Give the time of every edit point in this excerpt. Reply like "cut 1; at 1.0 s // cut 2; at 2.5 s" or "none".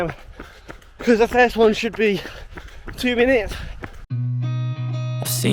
cut 1; at 4.1 s